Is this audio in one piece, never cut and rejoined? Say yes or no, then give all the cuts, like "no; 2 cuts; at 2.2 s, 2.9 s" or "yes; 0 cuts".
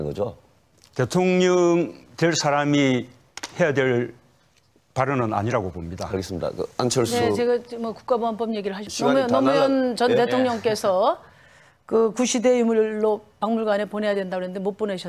no; 1 cut; at 9.6 s